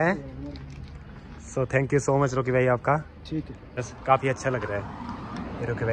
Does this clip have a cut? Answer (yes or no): yes